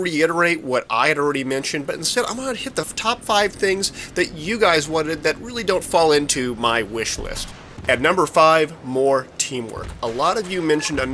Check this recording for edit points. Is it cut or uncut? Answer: cut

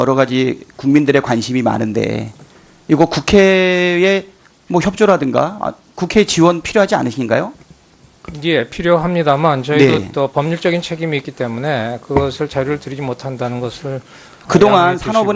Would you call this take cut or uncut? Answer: uncut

